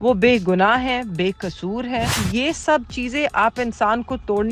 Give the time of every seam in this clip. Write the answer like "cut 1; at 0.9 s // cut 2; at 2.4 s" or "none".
cut 1; at 2.2 s